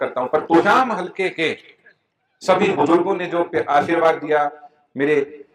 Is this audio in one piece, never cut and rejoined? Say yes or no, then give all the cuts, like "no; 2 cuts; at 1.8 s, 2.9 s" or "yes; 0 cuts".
yes; 0 cuts